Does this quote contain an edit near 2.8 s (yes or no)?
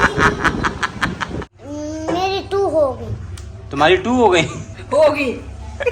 no